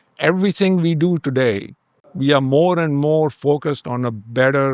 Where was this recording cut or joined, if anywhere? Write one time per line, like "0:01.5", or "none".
0:02.1